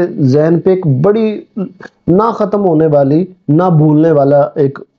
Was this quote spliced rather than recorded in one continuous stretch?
no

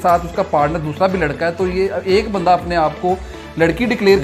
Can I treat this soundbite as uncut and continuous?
yes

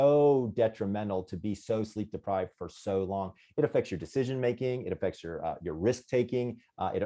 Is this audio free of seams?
yes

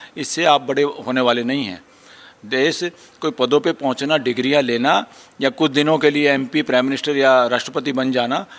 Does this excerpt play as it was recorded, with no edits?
yes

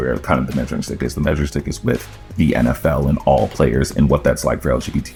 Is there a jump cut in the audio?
no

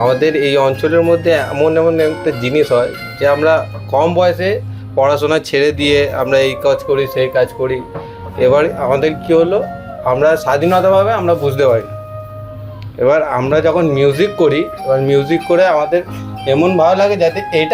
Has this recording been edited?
no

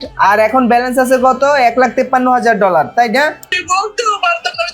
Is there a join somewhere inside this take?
yes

